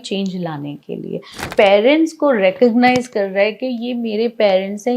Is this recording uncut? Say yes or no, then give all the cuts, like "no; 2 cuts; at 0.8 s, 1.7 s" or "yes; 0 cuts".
no; 1 cut; at 1.4 s